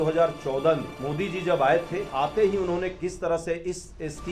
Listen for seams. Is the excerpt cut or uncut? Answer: cut